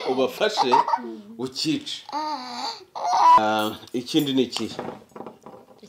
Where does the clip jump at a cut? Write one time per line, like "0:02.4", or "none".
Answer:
0:03.4